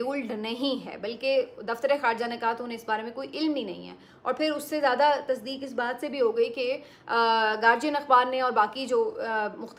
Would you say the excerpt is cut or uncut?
uncut